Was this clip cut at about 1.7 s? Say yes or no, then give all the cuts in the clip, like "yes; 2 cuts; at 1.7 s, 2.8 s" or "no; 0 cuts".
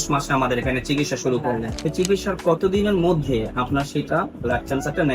yes; 1 cut; at 1.7 s